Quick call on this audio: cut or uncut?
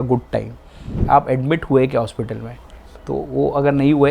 cut